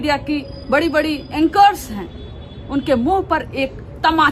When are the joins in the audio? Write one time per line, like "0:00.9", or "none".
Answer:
none